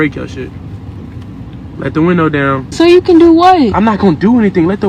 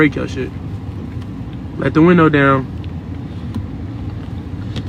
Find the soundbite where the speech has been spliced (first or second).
first